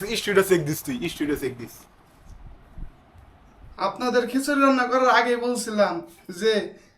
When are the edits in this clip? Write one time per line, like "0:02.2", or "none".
0:03.6